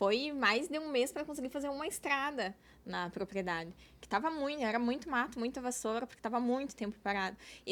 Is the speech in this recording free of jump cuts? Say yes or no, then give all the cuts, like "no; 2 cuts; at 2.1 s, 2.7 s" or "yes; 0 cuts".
yes; 0 cuts